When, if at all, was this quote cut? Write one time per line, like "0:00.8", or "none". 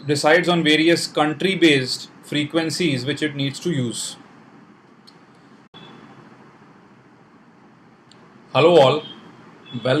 none